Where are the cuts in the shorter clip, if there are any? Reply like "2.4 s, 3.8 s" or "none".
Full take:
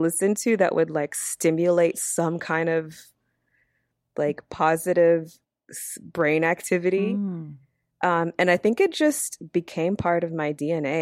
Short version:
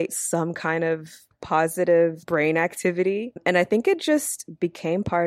1.4 s, 2.2 s, 3.4 s